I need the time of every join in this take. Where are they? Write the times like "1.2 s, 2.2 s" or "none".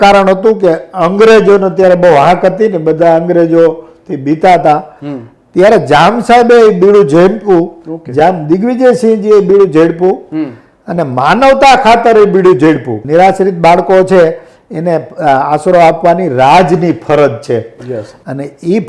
13.0 s